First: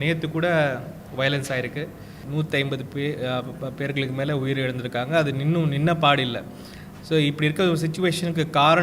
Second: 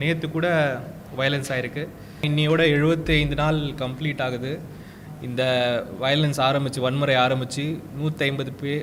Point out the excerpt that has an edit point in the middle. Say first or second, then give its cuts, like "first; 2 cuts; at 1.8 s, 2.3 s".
first; 1 cut; at 2.1 s